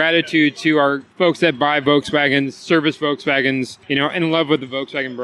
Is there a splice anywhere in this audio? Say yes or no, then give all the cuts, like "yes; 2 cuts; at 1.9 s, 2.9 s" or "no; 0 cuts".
yes; 2 cuts; at 1.1 s, 3.8 s